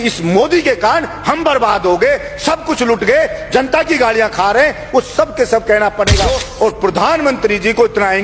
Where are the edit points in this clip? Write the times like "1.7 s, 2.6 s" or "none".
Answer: 6.4 s